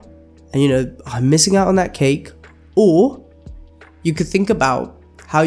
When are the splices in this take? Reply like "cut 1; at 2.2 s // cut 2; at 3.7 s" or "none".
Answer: none